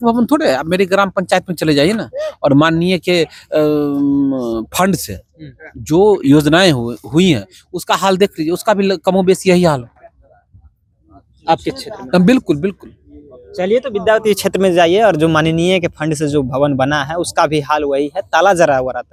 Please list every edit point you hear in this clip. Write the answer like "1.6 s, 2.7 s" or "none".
none